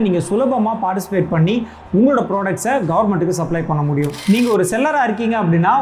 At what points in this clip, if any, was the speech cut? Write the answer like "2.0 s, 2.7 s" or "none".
4.2 s